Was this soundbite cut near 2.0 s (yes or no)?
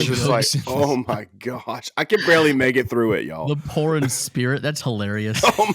no